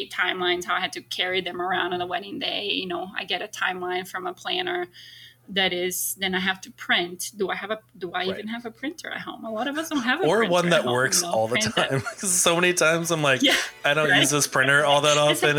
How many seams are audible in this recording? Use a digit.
0